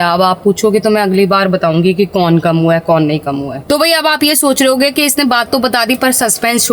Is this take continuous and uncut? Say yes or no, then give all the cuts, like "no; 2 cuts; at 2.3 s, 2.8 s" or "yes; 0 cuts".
yes; 0 cuts